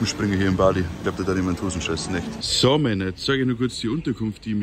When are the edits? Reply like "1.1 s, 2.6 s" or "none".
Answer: 0.9 s, 2.4 s

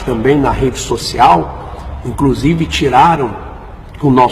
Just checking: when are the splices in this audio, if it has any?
1.8 s

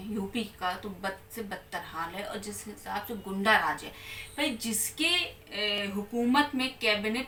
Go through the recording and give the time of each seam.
none

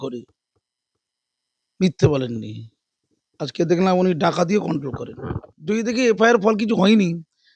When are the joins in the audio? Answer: 5.5 s

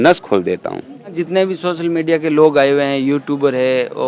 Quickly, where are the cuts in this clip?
1.1 s

